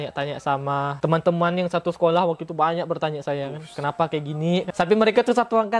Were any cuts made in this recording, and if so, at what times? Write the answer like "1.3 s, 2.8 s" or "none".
0.9 s, 4.7 s